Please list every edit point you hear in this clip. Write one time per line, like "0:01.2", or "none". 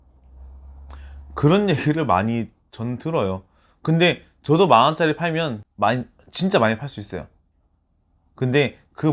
0:05.6